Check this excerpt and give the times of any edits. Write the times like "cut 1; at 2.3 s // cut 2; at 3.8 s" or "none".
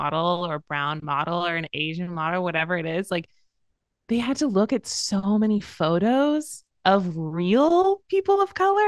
none